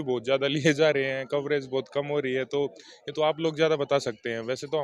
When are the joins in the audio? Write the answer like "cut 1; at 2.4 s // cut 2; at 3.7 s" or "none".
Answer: none